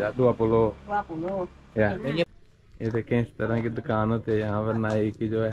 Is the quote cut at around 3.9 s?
no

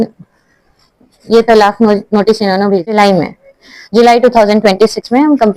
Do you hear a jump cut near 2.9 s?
yes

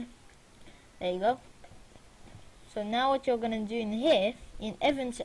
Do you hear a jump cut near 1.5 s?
yes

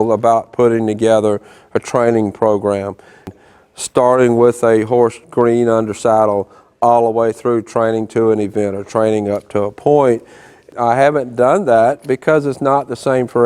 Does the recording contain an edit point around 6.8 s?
no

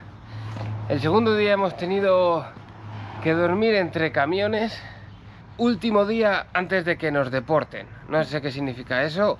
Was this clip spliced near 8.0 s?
no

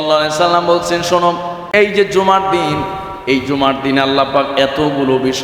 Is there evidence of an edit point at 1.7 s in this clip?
yes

